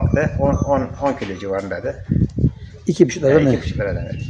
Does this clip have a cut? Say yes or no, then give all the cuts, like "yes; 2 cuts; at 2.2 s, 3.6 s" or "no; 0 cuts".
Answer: no; 0 cuts